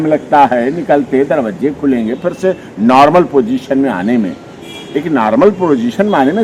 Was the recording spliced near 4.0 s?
no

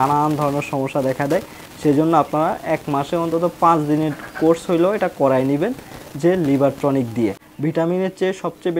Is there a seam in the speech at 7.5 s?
yes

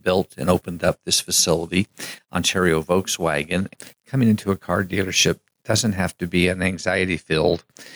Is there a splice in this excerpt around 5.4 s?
no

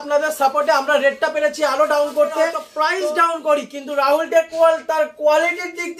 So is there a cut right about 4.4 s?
no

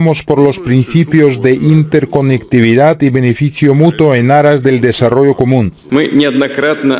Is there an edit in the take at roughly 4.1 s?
no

